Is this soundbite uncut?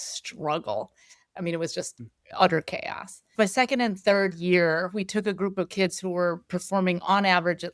no; 2 cuts; at 1.3 s, 3.3 s

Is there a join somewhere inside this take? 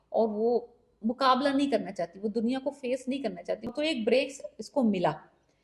yes; 1 cut; at 3.7 s

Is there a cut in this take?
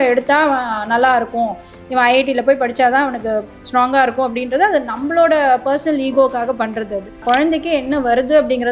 yes; 1 cut; at 7.2 s

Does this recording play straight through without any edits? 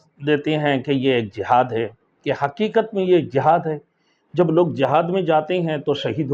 yes; 0 cuts

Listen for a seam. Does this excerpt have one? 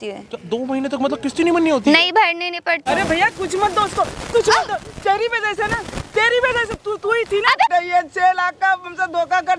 yes; 2 cuts; at 2.8 s, 7.7 s

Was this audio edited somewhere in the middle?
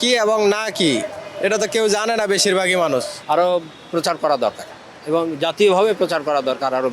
yes; 1 cut; at 3.1 s

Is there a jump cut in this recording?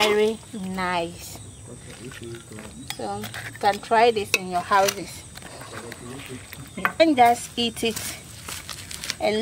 yes; 1 cut; at 7.0 s

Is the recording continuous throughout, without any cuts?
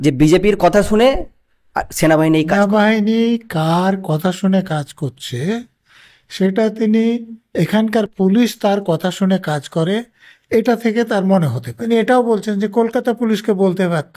no; 2 cuts; at 2.5 s, 11.8 s

